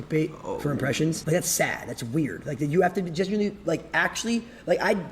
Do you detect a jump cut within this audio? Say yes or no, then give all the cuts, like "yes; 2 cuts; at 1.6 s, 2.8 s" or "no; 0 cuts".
yes; 2 cuts; at 1.2 s, 2.6 s